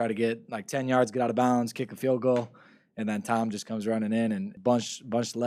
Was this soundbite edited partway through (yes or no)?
yes